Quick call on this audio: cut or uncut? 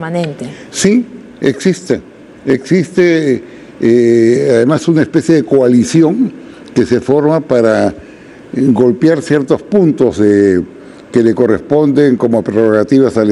uncut